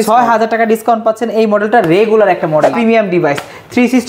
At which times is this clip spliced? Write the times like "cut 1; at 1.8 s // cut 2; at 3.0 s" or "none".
cut 1; at 2.7 s